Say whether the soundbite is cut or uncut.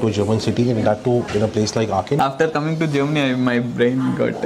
cut